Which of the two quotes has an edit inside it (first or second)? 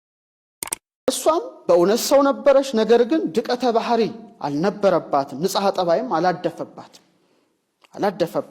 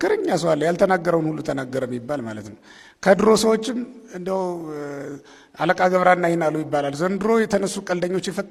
first